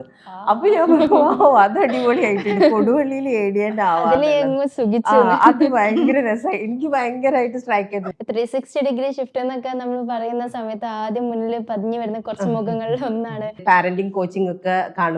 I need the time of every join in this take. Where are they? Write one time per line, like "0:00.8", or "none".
0:08.1
0:13.6